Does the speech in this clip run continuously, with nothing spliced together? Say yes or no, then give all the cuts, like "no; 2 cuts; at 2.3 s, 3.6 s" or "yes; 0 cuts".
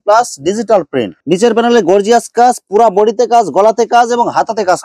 no; 1 cut; at 1.1 s